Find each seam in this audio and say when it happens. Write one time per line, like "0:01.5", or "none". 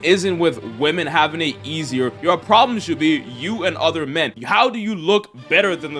0:02.2

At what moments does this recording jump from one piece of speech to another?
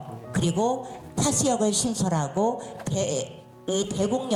none

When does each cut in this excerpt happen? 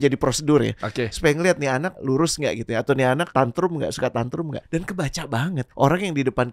0:01.9
0:03.3
0:04.6
0:05.7

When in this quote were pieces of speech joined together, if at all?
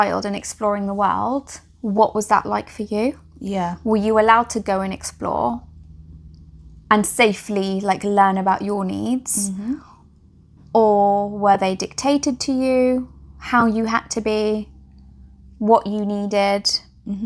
none

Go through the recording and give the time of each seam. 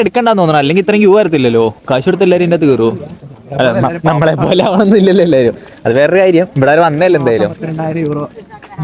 none

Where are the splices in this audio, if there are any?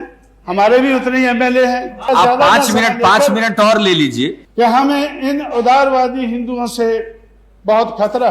0:02.0
0:04.4

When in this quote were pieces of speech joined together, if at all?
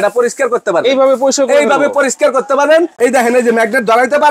0:02.9

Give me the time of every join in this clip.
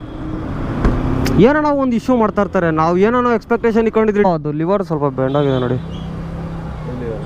0:04.2

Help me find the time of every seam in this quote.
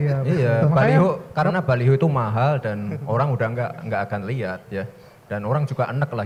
none

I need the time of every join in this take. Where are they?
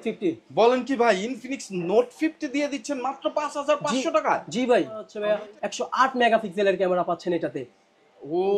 0:05.1

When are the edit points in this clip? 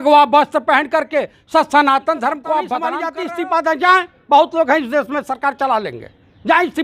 0:03.0

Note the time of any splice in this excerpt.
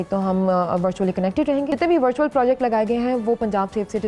0:01.7

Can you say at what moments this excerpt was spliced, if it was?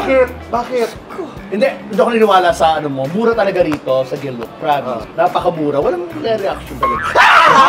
none

